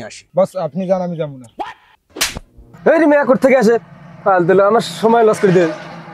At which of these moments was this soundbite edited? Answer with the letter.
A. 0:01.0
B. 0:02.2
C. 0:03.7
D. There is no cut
B